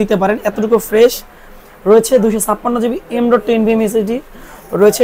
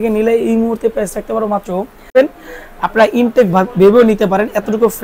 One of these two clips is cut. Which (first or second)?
second